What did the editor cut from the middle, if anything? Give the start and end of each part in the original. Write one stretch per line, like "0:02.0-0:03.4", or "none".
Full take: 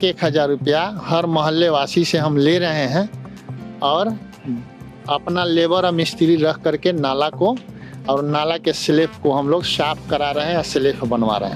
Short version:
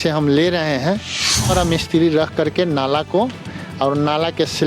0:03.6-0:05.8